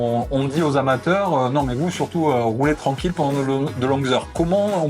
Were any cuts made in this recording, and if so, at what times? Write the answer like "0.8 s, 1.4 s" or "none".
none